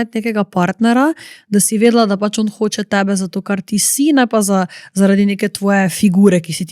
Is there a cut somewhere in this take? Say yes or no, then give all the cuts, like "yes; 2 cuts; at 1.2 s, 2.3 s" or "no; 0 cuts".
no; 0 cuts